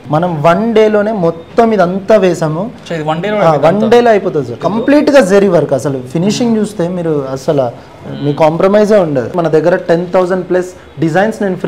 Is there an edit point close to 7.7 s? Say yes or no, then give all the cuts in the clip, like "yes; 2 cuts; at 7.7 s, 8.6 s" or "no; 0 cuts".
no; 2 cuts; at 4.6 s, 9.3 s